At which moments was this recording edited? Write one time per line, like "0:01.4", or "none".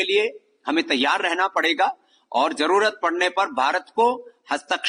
none